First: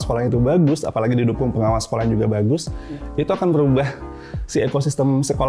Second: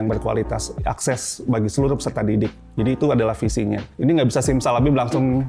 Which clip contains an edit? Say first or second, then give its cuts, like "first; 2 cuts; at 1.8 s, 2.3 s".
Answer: second; 1 cut; at 3.9 s